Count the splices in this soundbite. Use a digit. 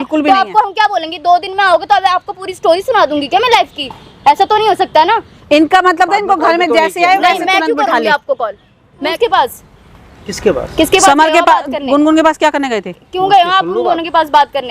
1